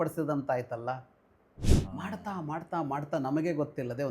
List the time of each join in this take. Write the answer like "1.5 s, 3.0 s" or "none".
1.7 s